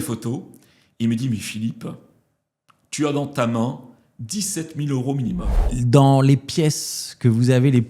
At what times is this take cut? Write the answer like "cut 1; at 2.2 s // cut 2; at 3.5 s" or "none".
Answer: cut 1; at 5.5 s

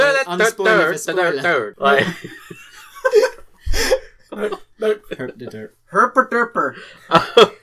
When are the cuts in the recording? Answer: cut 1; at 1.7 s

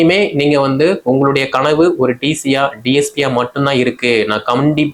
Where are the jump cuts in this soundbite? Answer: none

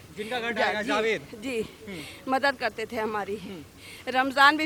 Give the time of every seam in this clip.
none

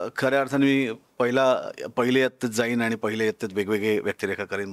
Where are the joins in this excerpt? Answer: none

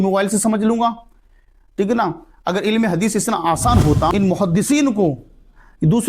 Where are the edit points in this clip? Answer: cut 1; at 4.1 s

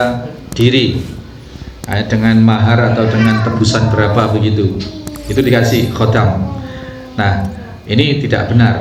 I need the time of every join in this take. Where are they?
none

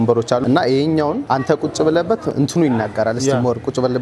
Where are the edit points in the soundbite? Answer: cut 1; at 2.3 s

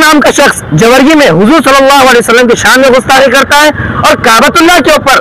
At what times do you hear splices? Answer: none

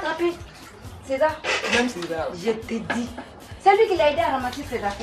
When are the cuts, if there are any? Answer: cut 1; at 3.0 s

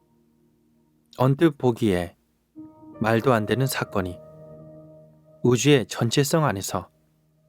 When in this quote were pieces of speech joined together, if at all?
cut 1; at 1.1 s

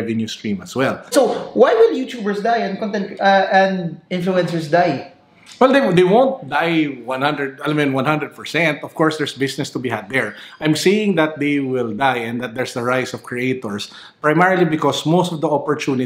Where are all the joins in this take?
cut 1; at 1.0 s

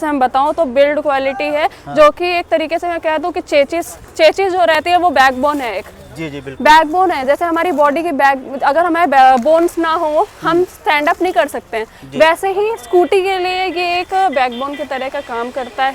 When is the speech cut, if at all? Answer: none

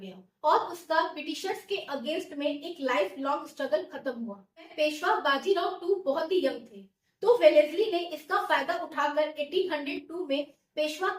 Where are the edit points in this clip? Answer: cut 1; at 4.7 s

